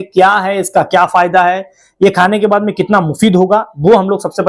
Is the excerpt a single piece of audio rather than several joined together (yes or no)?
yes